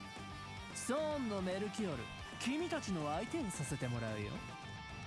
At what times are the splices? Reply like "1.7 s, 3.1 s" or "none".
none